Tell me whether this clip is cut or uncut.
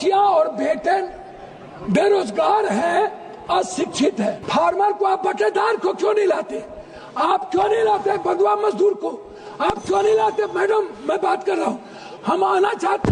cut